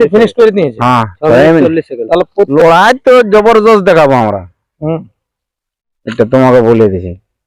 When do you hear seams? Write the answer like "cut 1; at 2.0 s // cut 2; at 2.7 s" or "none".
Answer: cut 1; at 2.5 s

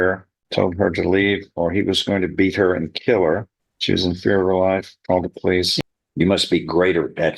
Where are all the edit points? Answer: cut 1; at 5.7 s

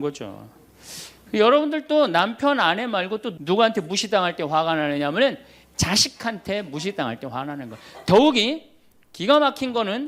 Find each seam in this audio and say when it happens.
cut 1; at 3.3 s

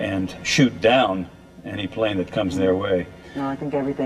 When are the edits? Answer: cut 1; at 1.7 s

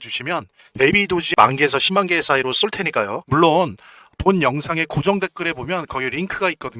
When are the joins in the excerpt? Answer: none

